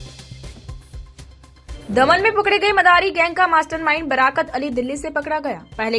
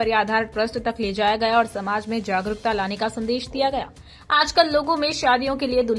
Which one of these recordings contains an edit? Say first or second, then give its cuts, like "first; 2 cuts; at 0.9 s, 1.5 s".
first; 1 cut; at 1.8 s